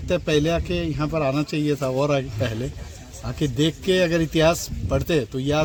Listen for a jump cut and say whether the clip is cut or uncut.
uncut